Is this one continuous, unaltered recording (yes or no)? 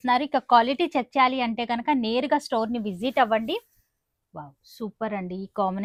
yes